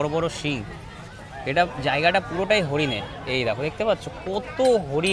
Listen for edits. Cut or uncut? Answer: uncut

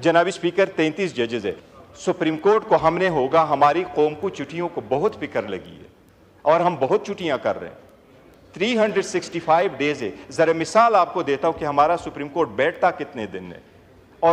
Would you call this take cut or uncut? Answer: cut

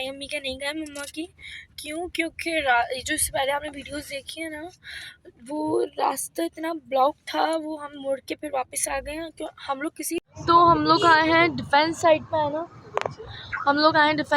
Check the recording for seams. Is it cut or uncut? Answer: cut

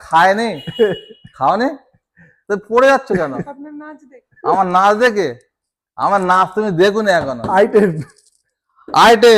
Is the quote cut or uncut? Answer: uncut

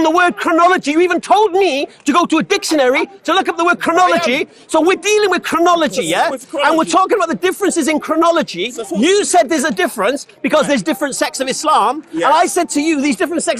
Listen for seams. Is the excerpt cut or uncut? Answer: uncut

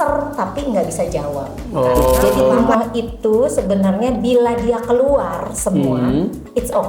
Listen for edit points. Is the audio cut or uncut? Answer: cut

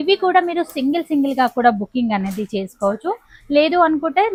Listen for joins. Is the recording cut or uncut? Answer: uncut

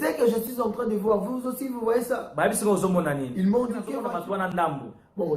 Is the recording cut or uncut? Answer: cut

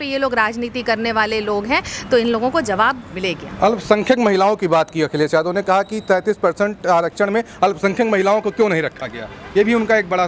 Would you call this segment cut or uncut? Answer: uncut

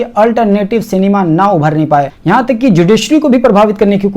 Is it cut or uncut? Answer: cut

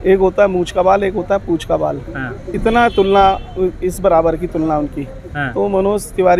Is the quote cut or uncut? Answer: uncut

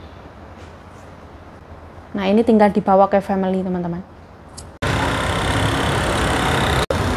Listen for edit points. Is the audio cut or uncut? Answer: uncut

